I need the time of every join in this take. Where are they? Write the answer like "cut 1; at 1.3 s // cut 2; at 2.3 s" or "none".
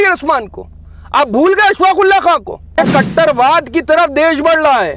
cut 1; at 2.8 s